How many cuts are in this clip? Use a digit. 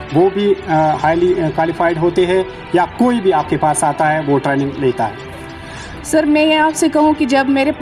0